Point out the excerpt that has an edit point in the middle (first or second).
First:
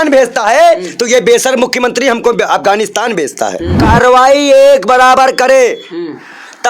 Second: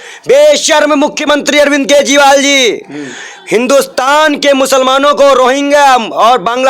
first